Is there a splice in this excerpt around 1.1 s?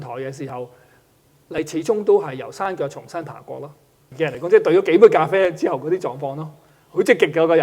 no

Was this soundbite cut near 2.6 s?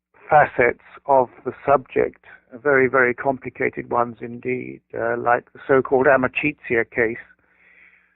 no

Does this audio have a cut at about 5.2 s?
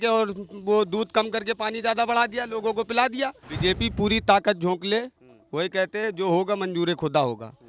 no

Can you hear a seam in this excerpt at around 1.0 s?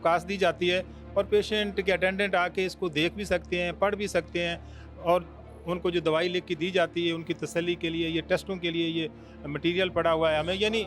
no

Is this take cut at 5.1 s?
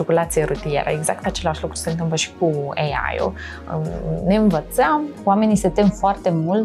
yes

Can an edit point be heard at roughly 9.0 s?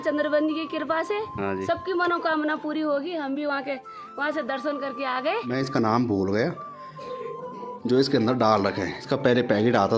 yes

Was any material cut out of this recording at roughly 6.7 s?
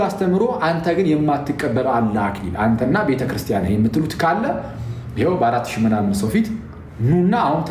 no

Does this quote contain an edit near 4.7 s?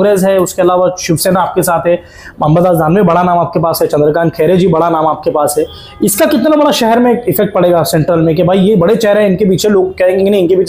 no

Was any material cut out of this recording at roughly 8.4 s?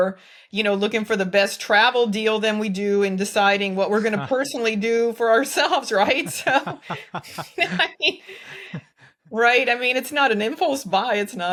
no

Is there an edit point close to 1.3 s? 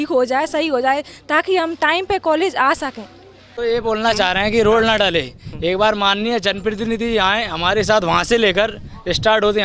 no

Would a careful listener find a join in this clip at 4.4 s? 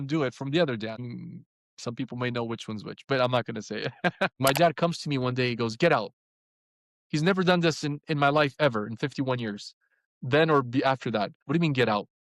yes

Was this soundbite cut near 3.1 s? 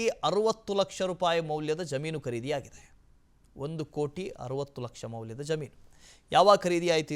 yes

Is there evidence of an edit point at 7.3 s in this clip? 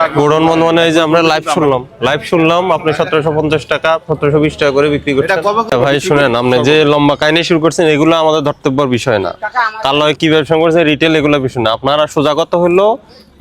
no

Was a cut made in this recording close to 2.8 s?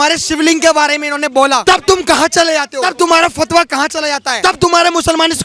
yes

